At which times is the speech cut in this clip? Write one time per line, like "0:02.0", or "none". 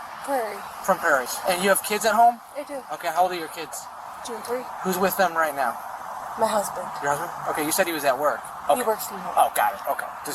0:01.3
0:08.5